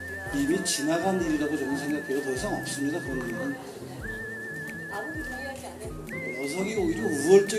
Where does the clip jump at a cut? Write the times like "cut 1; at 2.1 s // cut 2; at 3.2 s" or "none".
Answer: cut 1; at 1.2 s